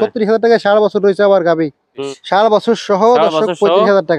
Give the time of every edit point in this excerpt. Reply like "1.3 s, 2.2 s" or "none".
2.1 s